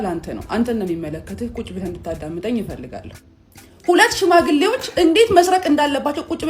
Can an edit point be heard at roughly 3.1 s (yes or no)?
yes